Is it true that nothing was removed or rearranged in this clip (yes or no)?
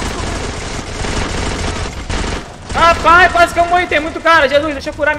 yes